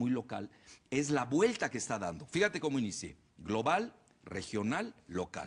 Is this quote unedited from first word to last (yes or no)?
no